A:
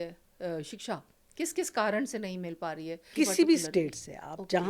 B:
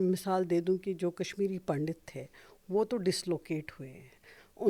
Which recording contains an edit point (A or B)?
A